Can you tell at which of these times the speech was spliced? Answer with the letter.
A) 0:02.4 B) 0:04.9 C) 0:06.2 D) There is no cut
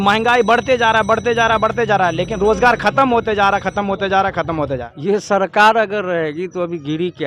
B